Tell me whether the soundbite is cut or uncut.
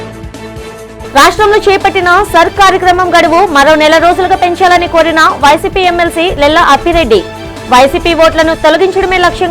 cut